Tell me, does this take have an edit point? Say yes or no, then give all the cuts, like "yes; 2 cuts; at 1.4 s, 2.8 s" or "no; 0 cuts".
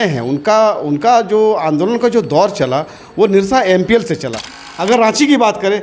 yes; 1 cut; at 4.5 s